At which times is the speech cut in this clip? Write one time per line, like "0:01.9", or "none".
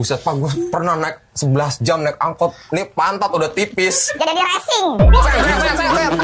0:04.2